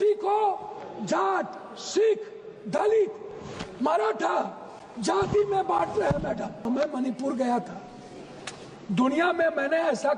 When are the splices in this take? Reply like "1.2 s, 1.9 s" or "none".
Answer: 6.7 s